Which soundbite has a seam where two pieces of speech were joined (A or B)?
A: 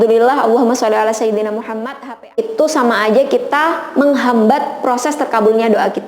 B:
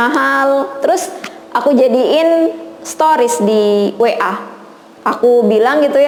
A